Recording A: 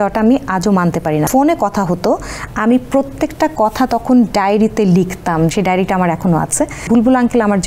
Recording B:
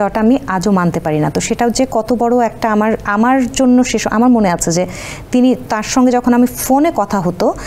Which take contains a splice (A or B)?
A